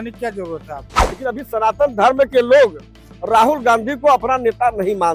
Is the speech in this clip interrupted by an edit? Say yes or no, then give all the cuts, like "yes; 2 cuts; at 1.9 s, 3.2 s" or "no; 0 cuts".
yes; 1 cut; at 1.0 s